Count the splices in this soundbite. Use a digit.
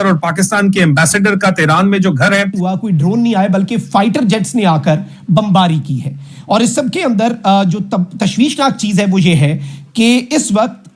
1